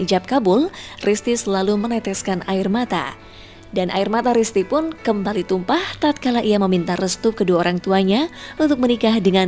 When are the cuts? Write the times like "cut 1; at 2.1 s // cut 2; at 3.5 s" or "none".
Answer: cut 1; at 6.6 s

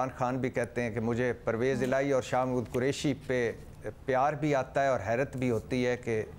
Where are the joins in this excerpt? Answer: none

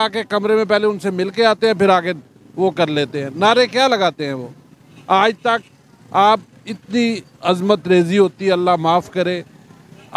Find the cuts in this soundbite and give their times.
none

